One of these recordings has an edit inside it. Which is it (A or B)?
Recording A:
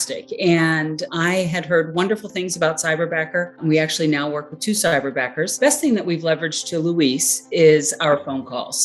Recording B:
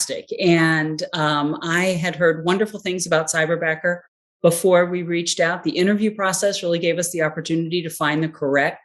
A